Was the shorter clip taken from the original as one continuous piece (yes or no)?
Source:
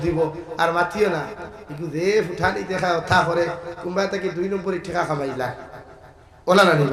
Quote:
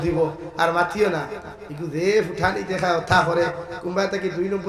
yes